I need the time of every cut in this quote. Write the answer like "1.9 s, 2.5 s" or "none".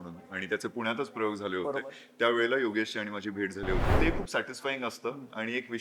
3.9 s